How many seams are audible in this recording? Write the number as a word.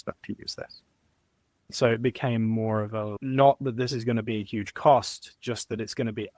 zero